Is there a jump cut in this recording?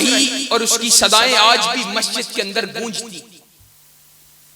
yes; 1 cut; at 3.4 s

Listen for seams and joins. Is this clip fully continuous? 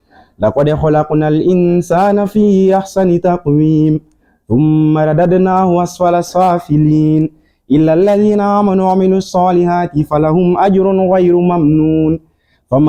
yes; 0 cuts

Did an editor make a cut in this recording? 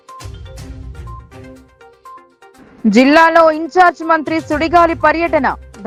no; 0 cuts

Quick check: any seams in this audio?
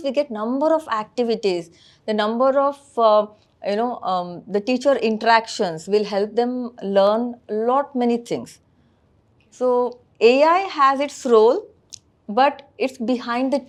no; 0 cuts

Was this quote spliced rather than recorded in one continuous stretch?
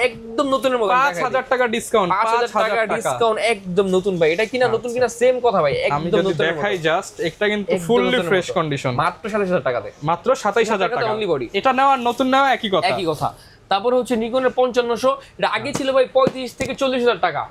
no; 0 cuts

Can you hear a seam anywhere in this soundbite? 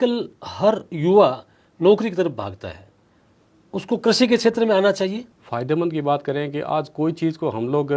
yes; 1 cut; at 5.3 s

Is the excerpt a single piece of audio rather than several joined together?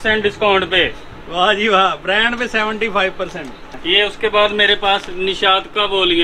no; 1 cut; at 3.7 s

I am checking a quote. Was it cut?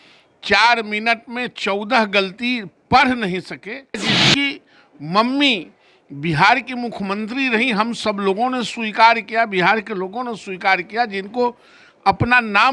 yes; 1 cut; at 4.0 s

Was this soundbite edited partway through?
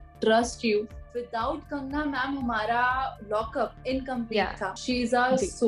yes; 3 cuts; at 1.1 s, 3.5 s, 4.8 s

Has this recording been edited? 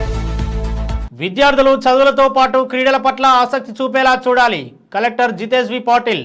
no; 0 cuts

